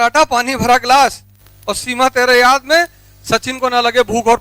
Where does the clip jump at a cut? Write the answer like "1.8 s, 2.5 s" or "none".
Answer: none